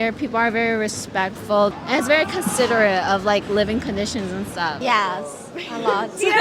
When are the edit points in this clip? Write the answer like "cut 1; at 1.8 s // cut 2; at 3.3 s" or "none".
cut 1; at 1.7 s // cut 2; at 4.8 s